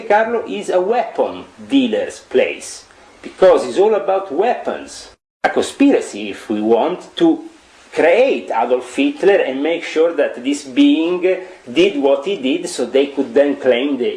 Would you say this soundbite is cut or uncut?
cut